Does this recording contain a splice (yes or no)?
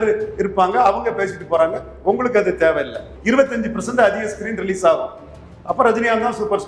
yes